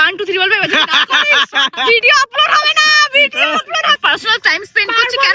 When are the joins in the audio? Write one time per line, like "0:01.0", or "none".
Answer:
0:04.0